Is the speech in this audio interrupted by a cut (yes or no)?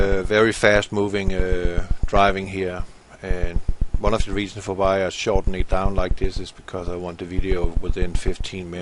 no